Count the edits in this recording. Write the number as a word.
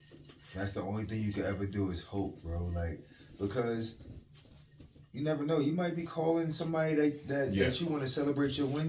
zero